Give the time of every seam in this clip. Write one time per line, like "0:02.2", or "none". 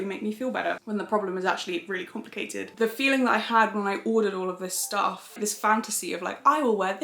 0:02.7
0:05.3

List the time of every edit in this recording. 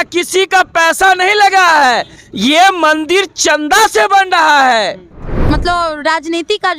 0:05.4

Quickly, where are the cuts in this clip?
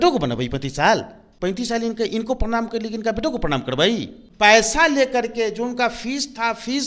0:01.2
0:04.2

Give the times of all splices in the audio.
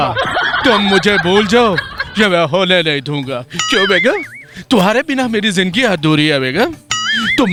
none

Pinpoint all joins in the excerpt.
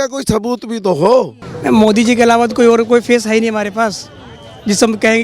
0:01.4

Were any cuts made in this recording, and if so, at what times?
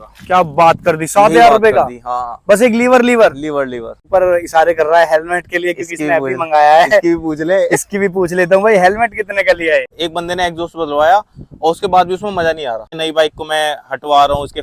0:04.0
0:10.0
0:12.9

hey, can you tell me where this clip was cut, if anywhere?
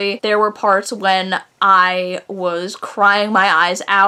none

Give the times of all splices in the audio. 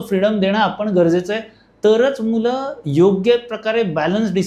none

